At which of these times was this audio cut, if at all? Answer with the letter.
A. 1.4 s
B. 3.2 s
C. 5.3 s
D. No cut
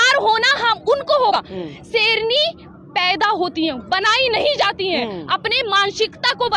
A